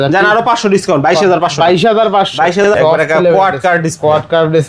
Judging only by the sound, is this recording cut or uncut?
cut